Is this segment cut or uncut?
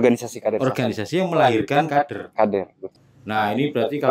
cut